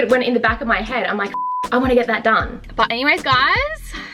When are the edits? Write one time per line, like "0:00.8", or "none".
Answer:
0:02.7